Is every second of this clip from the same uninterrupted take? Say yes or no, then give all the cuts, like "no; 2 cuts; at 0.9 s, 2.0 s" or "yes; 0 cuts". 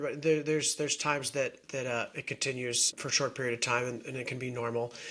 no; 1 cut; at 2.9 s